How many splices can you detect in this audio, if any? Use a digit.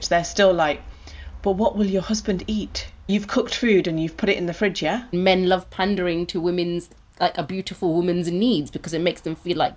2